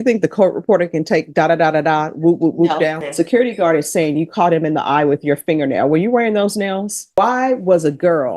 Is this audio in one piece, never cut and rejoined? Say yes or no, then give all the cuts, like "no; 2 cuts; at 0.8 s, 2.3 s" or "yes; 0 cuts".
no; 2 cuts; at 3.0 s, 7.0 s